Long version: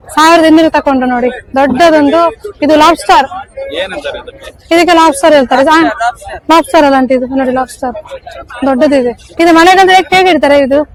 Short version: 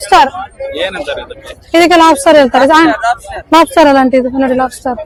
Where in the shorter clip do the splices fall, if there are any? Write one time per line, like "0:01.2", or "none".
none